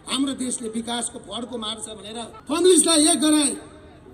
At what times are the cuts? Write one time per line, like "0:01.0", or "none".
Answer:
0:02.4